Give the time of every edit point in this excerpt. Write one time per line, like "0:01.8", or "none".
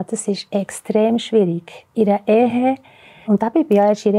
0:03.3